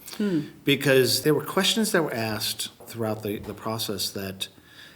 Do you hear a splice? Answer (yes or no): yes